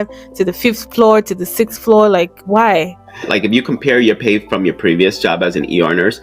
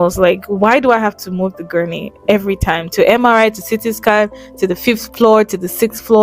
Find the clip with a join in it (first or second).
first